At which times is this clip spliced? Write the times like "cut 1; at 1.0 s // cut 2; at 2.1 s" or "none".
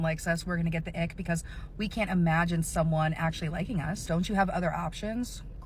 none